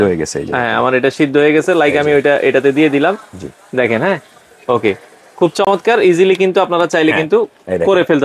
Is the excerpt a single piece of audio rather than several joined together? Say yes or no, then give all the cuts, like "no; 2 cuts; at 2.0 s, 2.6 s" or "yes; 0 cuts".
yes; 0 cuts